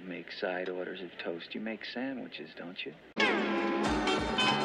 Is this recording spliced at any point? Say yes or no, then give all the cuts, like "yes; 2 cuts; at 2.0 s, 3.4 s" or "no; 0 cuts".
no; 0 cuts